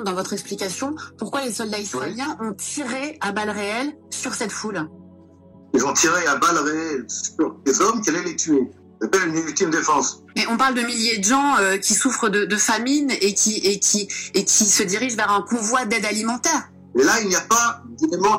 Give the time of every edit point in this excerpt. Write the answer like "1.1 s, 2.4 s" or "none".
none